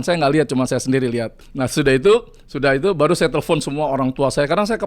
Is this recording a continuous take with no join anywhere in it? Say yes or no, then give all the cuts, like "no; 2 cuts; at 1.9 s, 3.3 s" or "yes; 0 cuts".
no; 1 cut; at 1.4 s